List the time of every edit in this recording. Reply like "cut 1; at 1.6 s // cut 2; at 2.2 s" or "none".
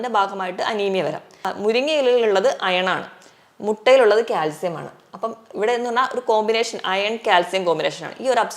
cut 1; at 1.5 s